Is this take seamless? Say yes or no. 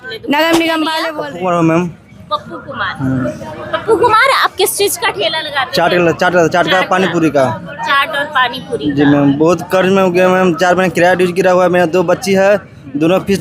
no